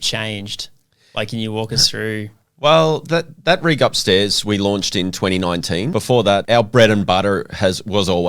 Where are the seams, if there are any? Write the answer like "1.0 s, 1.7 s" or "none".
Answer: 6.4 s